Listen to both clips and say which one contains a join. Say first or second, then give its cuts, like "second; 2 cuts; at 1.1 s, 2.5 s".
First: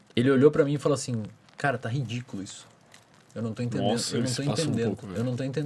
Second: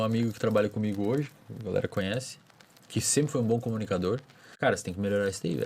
second; 1 cut; at 4.5 s